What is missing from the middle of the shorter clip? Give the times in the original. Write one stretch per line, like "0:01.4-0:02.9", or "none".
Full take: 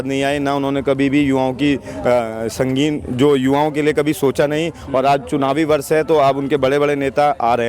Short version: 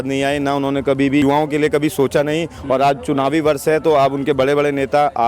0:01.2-0:03.5